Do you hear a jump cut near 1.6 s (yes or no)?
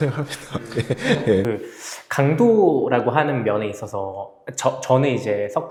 no